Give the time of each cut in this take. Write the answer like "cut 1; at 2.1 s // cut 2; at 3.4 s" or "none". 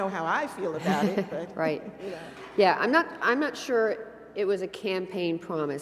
cut 1; at 4.1 s